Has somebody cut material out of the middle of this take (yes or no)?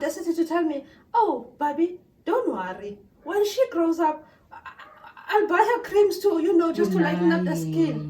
no